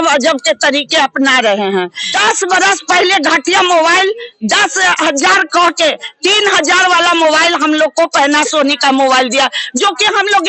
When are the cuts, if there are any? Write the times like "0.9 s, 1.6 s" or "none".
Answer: 2.0 s